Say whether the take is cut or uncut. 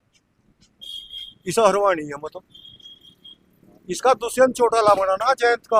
uncut